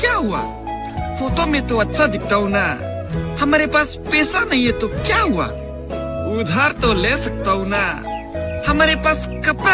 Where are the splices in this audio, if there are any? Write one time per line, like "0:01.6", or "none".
none